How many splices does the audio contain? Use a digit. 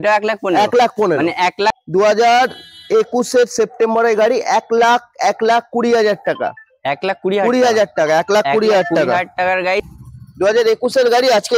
2